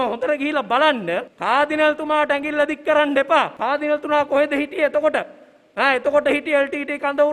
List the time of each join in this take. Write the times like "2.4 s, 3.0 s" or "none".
1.3 s, 3.6 s

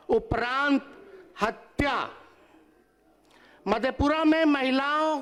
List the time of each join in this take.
none

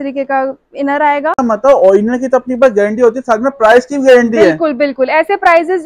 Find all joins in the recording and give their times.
1.4 s

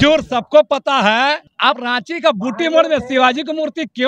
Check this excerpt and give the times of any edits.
1.5 s

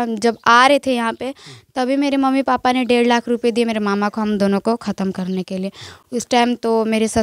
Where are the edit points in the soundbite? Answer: none

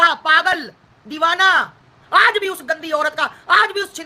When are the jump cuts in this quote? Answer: 2.0 s

